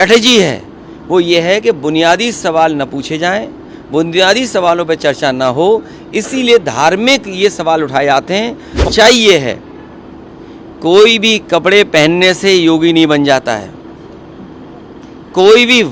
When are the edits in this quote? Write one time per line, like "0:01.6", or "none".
0:08.8